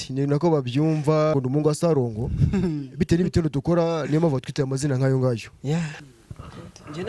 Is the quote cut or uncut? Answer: cut